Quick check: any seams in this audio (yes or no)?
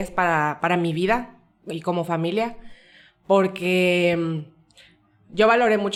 no